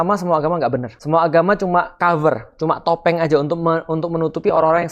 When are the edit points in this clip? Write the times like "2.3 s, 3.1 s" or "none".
0.9 s, 1.9 s